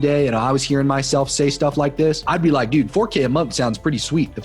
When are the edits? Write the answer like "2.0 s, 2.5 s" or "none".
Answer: none